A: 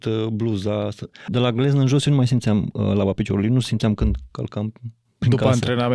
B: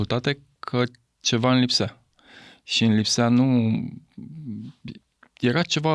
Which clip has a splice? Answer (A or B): A